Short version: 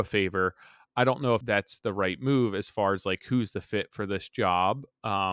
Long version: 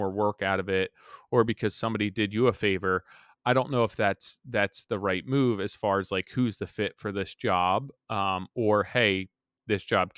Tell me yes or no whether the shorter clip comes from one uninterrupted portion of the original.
no